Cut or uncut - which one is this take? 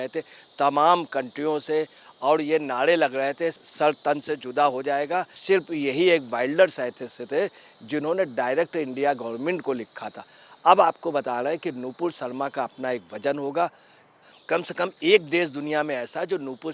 cut